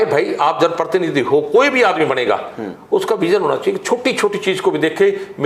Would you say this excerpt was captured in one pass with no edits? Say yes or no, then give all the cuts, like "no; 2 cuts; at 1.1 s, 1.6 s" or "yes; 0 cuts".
yes; 0 cuts